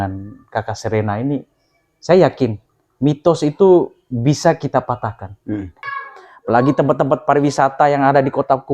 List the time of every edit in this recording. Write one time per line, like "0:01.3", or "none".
0:05.8